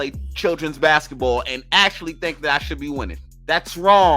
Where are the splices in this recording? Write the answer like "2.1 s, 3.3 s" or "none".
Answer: 3.3 s